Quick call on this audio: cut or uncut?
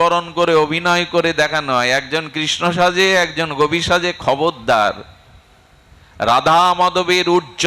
uncut